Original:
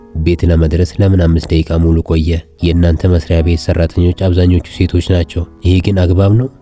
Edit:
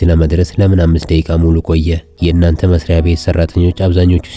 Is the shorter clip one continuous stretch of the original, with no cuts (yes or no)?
yes